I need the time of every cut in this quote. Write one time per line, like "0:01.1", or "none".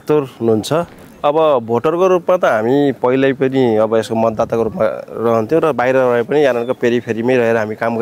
0:01.0